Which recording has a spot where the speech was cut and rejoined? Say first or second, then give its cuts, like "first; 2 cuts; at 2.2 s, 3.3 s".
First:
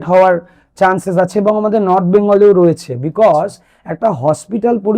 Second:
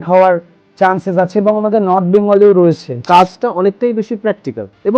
second; 1 cut; at 2.9 s